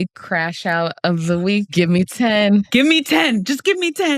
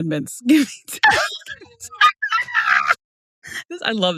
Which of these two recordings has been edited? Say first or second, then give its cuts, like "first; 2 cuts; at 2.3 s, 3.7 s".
first; 2 cuts; at 0.9 s, 2.1 s